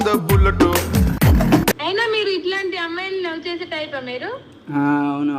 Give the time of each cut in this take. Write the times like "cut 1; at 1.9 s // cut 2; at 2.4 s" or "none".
cut 1; at 1.8 s